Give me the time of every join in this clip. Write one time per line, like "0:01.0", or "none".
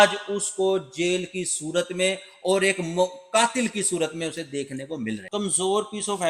0:05.2